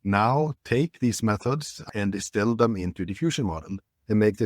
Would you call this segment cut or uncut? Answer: cut